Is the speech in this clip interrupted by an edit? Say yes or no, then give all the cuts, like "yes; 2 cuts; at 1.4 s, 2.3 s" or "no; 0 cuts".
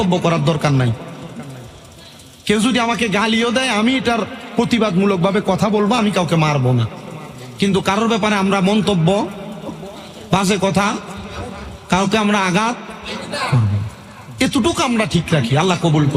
no; 0 cuts